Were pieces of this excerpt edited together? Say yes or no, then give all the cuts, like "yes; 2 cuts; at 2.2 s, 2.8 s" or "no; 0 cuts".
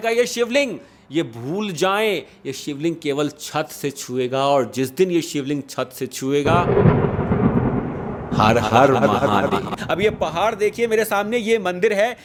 no; 0 cuts